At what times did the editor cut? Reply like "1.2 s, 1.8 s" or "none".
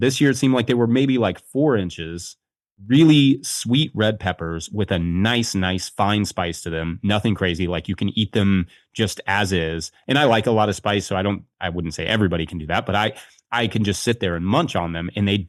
none